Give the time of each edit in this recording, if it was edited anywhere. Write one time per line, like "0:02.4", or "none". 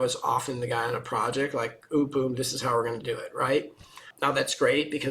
0:04.1